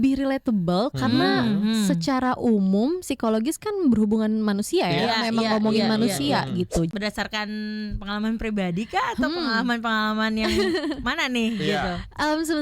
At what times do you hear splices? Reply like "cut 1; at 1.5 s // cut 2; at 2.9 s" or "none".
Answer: cut 1; at 6.9 s